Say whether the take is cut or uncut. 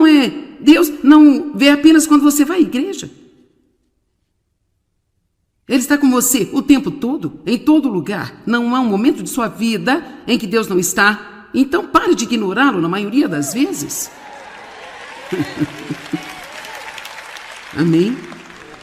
cut